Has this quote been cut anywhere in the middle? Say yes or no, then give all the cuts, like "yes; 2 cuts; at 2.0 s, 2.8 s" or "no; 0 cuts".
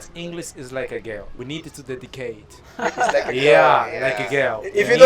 yes; 1 cut; at 1.3 s